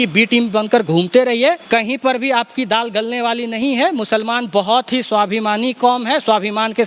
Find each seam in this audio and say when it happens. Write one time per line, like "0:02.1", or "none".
0:01.6